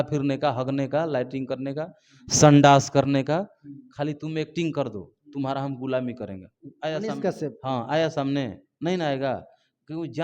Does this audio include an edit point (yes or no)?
no